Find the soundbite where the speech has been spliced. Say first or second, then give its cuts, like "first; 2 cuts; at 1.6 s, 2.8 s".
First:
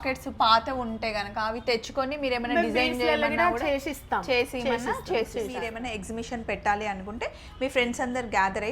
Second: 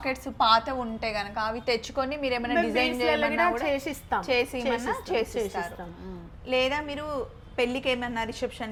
first; 1 cut; at 5.7 s